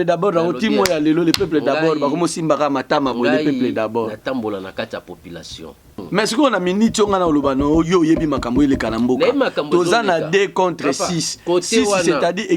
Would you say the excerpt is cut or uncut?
cut